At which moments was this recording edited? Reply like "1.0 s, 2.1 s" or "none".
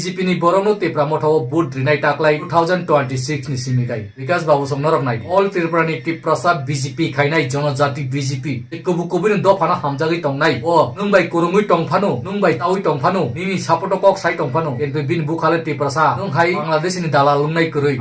11.0 s, 12.6 s, 16.7 s